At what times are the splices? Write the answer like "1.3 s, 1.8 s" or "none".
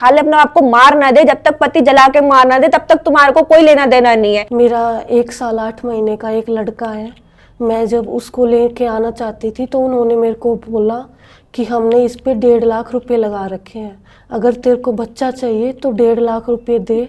4.5 s